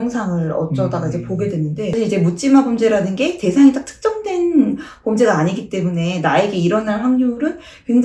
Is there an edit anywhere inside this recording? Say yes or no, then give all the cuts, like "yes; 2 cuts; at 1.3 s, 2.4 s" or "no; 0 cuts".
yes; 1 cut; at 1.9 s